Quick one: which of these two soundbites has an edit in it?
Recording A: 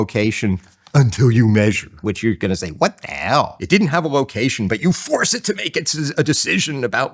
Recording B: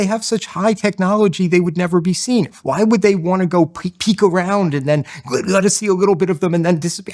A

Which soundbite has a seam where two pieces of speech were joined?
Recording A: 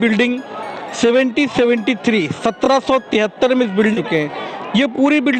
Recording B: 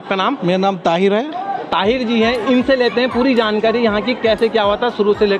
A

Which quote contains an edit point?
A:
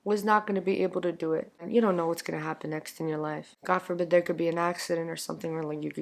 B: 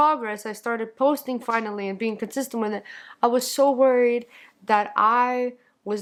A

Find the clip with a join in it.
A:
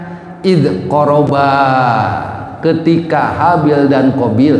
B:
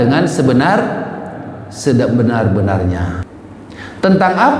B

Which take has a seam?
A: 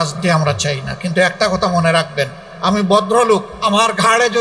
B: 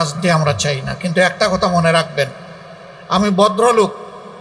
A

